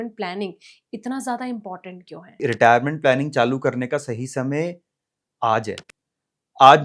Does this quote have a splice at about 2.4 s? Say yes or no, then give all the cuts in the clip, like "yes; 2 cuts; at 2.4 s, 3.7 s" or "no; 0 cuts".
yes; 1 cut; at 2.4 s